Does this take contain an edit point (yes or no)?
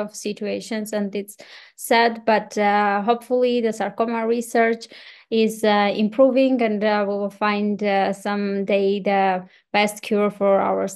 no